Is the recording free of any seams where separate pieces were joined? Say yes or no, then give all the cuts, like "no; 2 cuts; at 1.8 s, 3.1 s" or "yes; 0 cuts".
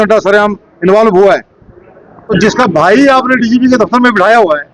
no; 1 cut; at 2.2 s